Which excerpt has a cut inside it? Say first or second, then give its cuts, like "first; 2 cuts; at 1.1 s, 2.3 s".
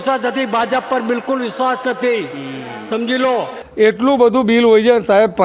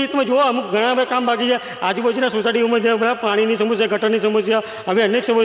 first; 1 cut; at 3.6 s